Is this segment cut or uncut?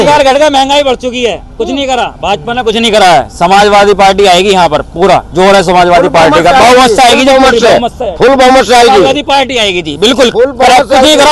uncut